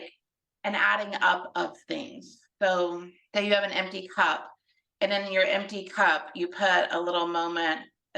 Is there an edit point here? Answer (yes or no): yes